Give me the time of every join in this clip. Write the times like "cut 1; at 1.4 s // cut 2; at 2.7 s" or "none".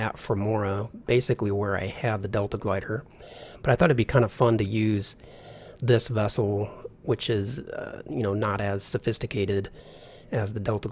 none